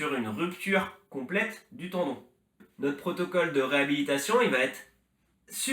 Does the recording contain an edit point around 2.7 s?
yes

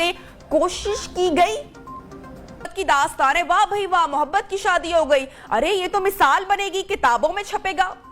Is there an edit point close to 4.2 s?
no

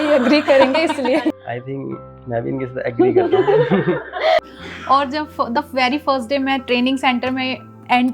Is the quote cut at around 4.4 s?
yes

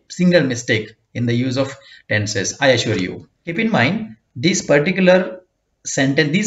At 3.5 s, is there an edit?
yes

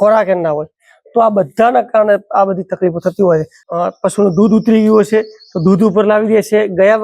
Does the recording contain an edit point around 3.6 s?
yes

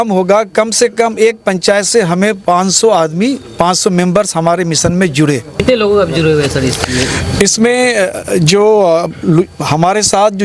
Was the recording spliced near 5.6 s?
yes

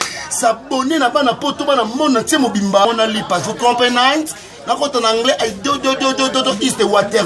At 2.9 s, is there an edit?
yes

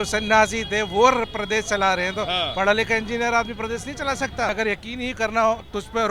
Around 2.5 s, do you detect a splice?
no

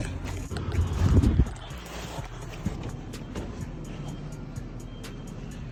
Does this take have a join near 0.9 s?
no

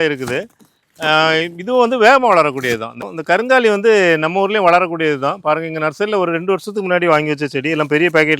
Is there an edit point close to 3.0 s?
yes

